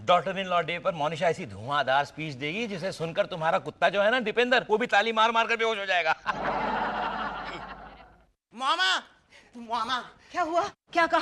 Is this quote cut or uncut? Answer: uncut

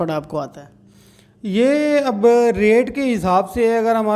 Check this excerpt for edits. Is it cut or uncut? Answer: uncut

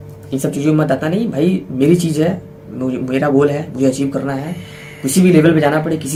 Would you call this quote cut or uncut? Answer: uncut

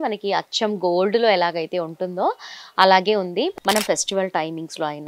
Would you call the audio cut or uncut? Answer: cut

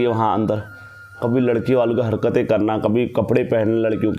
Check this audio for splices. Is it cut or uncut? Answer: cut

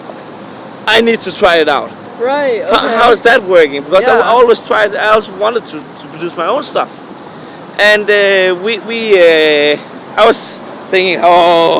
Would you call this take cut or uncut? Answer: uncut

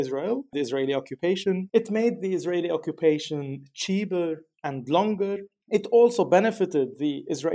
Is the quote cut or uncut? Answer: cut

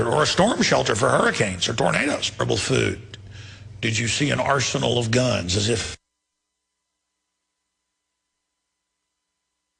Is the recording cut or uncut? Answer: uncut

